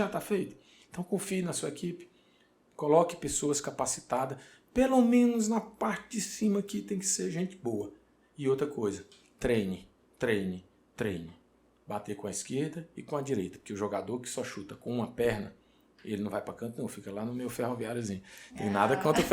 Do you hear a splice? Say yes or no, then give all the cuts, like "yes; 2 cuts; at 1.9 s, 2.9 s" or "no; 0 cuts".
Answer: no; 0 cuts